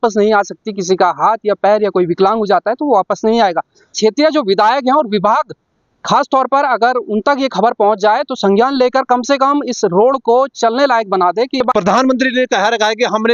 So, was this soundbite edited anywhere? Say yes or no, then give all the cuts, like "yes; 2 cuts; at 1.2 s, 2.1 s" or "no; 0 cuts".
yes; 2 cuts; at 3.9 s, 11.6 s